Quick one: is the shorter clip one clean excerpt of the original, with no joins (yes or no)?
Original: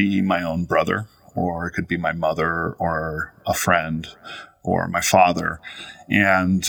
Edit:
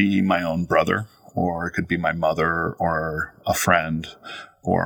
yes